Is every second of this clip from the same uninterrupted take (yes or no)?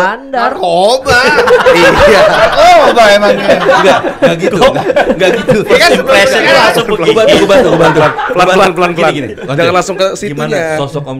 yes